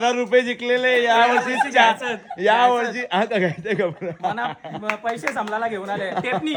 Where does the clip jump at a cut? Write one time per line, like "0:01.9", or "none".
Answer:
none